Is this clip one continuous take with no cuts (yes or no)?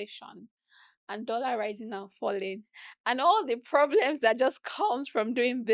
yes